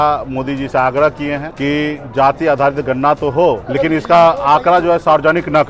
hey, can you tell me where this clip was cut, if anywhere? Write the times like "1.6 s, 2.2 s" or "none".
1.5 s, 3.6 s